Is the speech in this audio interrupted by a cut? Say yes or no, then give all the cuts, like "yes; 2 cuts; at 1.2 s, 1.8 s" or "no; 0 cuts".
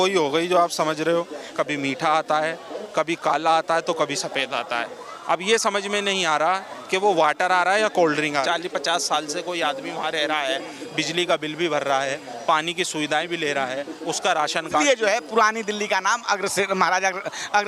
yes; 3 cuts; at 1.4 s, 8.4 s, 14.8 s